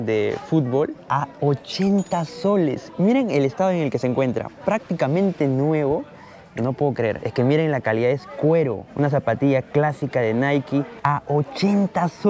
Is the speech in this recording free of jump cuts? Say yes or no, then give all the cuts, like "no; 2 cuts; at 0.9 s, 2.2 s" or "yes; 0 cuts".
no; 3 cuts; at 7.2 s, 8.8 s, 10.9 s